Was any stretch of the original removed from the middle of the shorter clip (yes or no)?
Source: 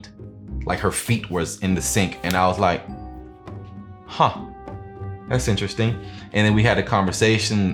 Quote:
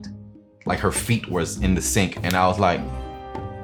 no